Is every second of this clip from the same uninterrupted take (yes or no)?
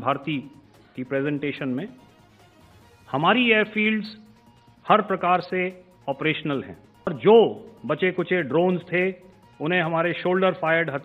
no